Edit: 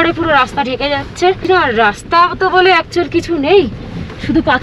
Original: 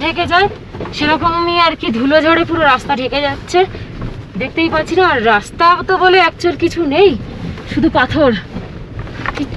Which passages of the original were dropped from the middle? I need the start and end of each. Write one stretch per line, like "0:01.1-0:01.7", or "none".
0:03.7-0:04.9